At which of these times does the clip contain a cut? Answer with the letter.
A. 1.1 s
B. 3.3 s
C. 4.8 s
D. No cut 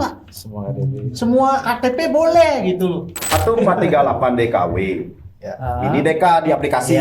B